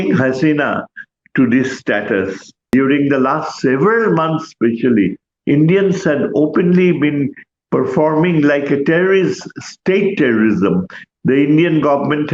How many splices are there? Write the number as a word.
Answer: one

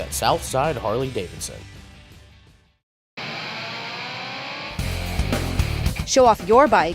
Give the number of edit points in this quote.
one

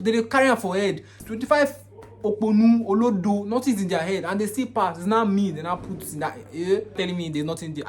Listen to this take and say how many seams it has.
two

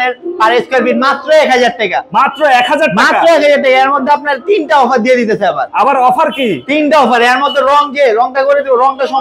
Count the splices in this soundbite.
zero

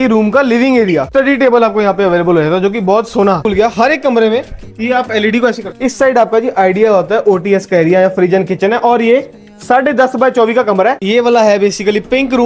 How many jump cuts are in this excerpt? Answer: four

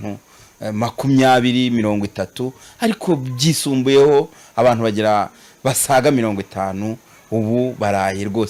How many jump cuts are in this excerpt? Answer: zero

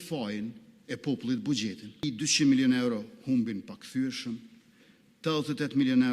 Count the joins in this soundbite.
one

